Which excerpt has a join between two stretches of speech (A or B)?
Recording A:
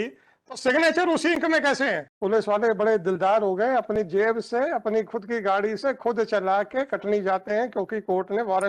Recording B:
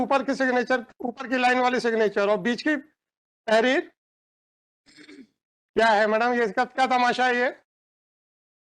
A